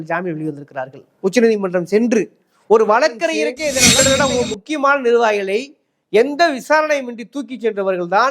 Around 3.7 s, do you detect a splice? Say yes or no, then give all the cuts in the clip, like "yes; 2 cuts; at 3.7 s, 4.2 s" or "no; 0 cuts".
yes; 1 cut; at 3.7 s